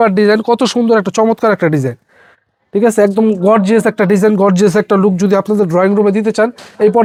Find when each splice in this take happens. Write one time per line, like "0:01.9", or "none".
none